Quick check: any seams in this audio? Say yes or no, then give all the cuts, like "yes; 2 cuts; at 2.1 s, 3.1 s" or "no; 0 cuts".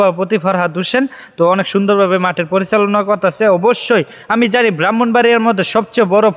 no; 0 cuts